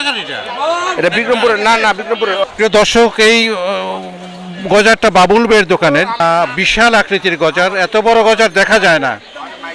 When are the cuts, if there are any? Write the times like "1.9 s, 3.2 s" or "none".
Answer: 2.4 s, 6.2 s